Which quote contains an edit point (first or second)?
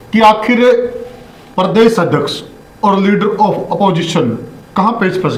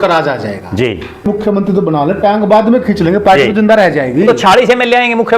second